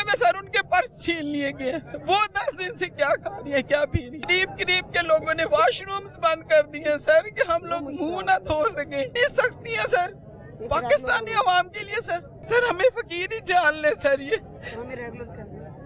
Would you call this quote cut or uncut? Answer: cut